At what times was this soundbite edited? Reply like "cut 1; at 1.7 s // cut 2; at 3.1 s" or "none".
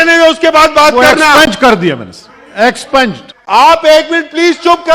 cut 1; at 3.3 s